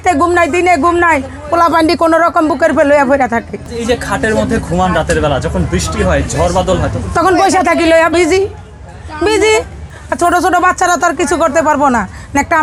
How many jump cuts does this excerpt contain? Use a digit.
0